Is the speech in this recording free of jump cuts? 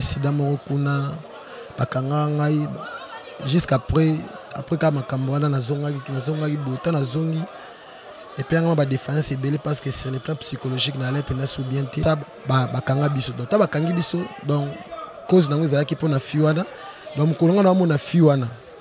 no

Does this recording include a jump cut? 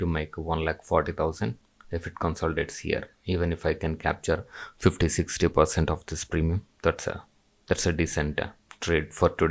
no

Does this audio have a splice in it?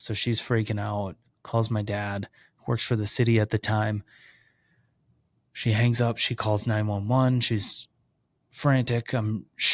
no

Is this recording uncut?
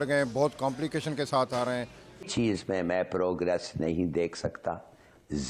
no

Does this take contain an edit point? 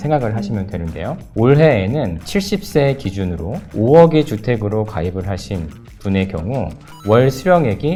no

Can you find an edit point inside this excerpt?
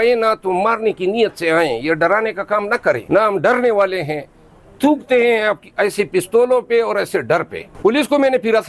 no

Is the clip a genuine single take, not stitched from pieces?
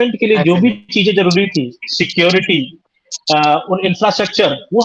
yes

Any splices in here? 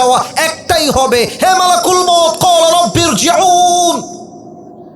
no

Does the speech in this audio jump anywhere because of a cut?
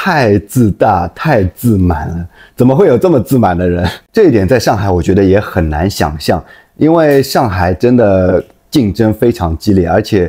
yes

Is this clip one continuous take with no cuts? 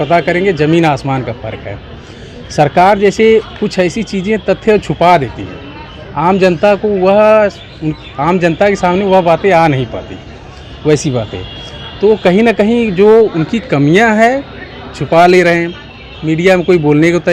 yes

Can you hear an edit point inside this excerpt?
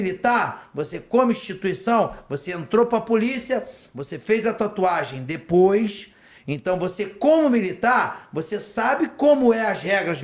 no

